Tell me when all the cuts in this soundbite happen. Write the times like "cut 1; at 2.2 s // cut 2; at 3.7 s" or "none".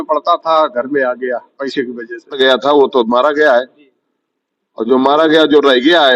cut 1; at 2.4 s